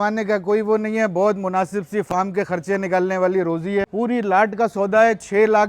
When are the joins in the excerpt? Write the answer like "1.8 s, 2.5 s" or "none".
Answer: 3.9 s